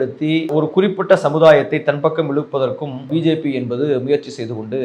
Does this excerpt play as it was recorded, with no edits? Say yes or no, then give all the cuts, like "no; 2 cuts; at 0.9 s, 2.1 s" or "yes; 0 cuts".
no; 1 cut; at 3.1 s